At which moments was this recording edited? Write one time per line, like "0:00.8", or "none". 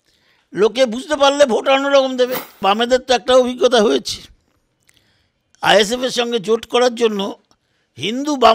0:02.6